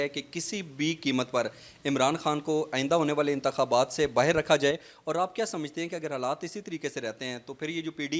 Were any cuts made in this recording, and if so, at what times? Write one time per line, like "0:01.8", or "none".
none